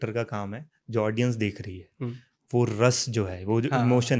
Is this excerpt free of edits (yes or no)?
yes